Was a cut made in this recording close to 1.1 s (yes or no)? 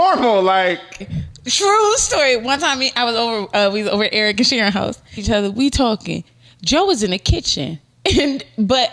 yes